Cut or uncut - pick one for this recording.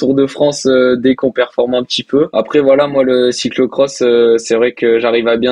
cut